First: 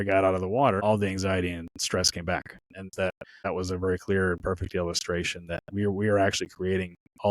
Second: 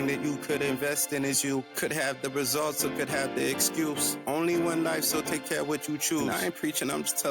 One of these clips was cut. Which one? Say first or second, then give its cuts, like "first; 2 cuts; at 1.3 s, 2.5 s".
first; 2 cuts; at 0.8 s, 2.8 s